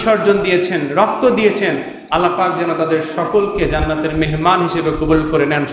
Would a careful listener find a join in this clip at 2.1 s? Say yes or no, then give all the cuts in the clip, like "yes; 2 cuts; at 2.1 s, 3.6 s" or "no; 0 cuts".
no; 0 cuts